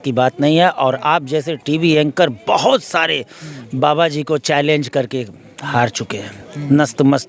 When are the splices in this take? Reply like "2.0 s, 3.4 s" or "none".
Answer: none